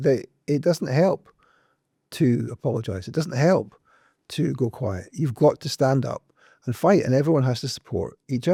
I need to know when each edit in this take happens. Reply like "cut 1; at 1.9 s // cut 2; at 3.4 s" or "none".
none